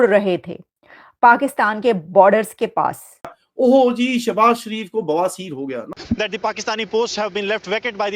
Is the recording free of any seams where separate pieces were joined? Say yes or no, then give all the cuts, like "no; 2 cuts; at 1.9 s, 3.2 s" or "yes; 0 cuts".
yes; 0 cuts